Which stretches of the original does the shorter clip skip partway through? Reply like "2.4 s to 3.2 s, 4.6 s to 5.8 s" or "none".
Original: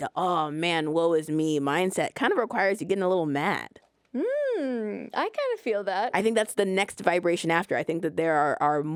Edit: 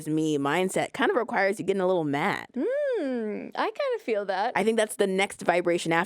3.7 s to 4.0 s